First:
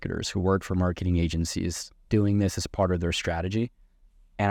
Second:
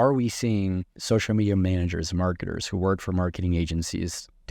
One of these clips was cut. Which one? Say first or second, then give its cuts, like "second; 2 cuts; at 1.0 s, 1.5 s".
second; 1 cut; at 0.9 s